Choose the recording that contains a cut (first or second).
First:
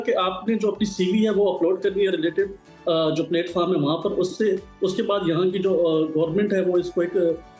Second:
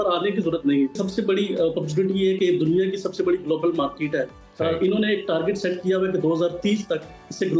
second